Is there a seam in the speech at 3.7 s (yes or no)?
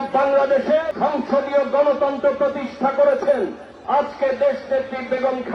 yes